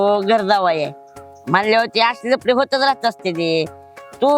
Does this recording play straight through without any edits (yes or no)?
yes